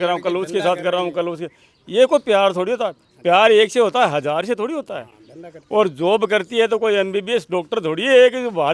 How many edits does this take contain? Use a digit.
0